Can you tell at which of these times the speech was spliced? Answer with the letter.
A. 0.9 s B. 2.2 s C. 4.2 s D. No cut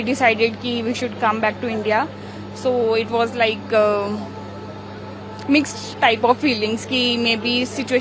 D